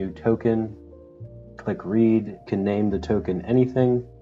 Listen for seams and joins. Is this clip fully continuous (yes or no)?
yes